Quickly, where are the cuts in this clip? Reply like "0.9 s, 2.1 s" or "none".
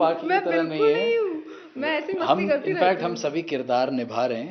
none